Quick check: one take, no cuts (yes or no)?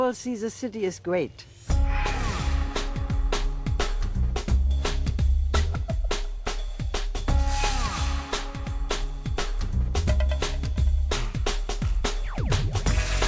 yes